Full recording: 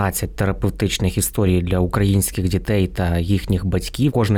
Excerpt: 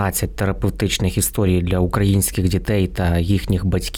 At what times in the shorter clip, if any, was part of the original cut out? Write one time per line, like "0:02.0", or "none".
none